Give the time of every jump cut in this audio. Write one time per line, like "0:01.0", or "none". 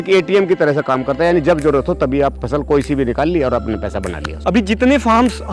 none